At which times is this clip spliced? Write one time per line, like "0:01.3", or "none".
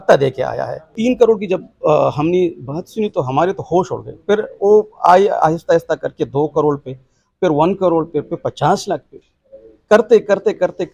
0:00.9